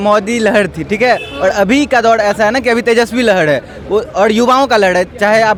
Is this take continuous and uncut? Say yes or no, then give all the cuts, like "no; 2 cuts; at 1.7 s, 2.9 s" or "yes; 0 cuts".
yes; 0 cuts